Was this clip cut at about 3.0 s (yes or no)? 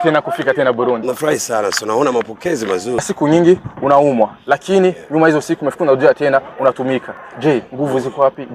yes